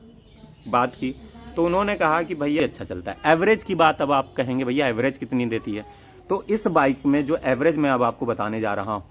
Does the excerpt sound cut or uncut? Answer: cut